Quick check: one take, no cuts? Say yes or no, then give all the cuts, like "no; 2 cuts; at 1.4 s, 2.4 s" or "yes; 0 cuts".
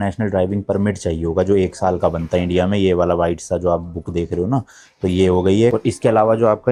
yes; 0 cuts